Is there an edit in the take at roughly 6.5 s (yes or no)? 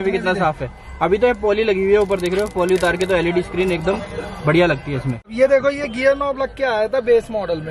no